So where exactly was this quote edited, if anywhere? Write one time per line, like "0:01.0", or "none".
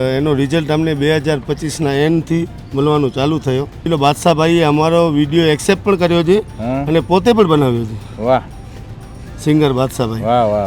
0:03.8